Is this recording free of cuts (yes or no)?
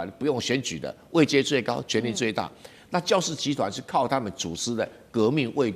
yes